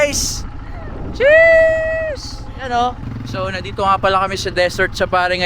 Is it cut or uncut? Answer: cut